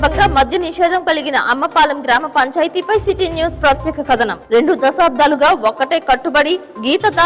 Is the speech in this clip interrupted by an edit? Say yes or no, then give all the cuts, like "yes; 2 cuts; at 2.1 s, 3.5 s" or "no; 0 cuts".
no; 0 cuts